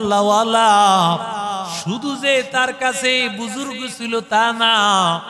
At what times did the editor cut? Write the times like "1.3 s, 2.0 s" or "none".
1.8 s